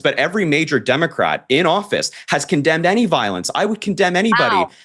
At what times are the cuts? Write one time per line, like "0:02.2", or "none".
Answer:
none